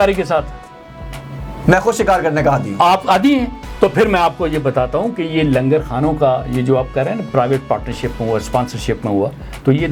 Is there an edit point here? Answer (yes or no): no